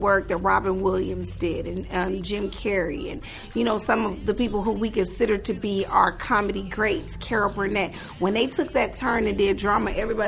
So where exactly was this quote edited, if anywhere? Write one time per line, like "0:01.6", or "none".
none